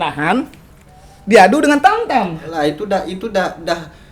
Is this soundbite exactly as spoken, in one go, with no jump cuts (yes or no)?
no